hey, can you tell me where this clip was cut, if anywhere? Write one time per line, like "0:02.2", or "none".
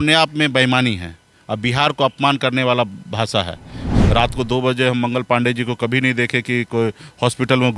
0:03.9